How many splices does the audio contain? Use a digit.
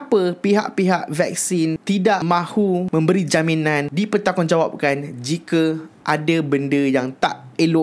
1